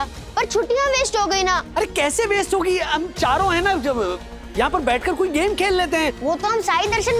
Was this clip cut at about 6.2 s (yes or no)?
yes